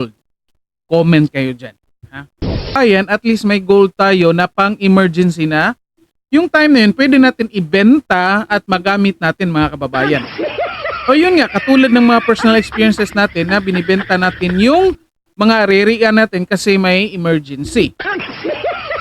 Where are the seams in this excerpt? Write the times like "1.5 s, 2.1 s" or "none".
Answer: 2.8 s